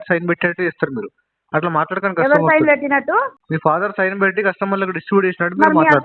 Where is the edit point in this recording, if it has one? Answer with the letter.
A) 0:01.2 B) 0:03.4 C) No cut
B